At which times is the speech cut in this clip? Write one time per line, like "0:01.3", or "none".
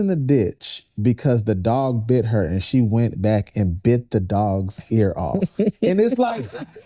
none